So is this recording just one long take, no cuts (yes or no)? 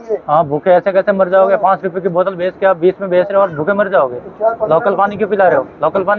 yes